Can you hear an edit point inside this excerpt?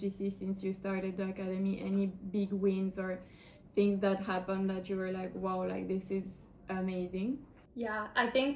no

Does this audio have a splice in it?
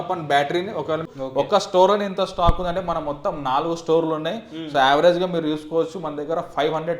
yes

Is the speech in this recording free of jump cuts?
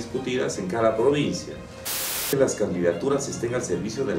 no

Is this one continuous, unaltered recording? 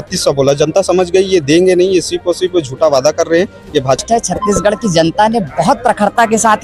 no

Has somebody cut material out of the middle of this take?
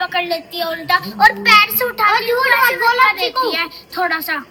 no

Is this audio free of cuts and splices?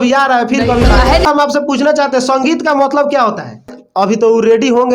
no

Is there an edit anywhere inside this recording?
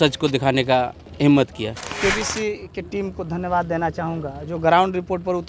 yes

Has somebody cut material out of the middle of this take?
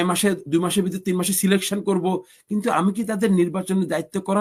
no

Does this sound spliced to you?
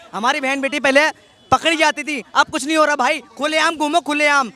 no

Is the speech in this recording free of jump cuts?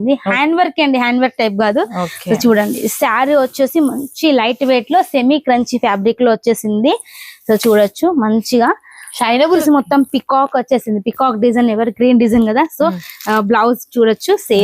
no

